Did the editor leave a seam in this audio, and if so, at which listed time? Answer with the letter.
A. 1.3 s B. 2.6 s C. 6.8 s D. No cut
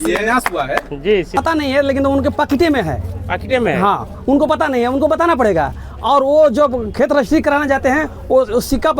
A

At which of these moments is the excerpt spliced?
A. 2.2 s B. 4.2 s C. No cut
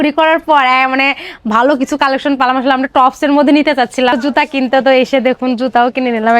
B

